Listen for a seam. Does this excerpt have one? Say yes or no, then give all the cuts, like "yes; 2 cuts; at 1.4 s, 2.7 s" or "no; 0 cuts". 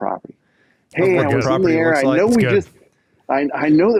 no; 0 cuts